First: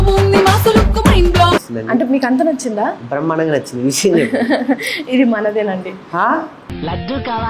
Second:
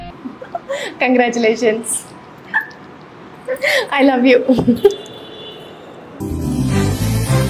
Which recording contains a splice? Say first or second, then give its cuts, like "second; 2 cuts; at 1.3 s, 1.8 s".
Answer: first; 1 cut; at 1.7 s